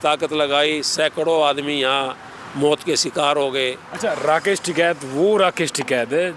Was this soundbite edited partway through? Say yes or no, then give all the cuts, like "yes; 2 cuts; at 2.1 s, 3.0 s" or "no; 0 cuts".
yes; 1 cut; at 3.9 s